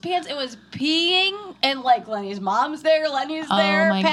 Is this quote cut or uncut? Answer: uncut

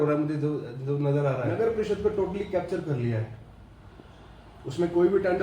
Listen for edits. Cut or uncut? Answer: cut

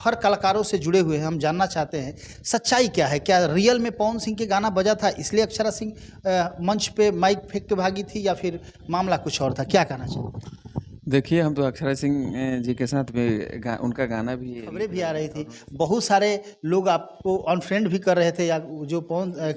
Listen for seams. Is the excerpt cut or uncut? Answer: cut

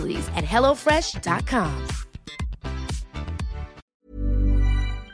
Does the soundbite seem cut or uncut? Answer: cut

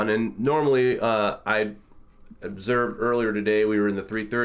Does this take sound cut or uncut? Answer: uncut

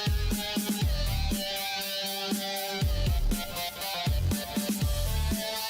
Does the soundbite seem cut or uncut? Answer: cut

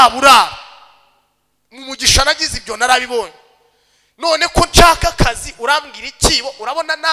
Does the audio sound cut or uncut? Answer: uncut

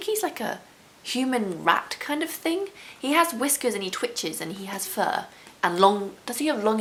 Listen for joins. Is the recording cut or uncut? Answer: uncut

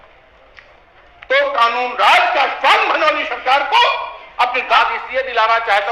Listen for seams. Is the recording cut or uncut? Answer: cut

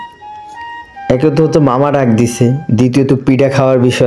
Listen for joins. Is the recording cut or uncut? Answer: uncut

